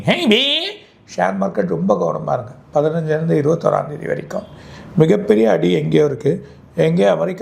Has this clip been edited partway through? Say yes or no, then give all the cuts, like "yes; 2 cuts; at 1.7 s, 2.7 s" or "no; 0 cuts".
no; 0 cuts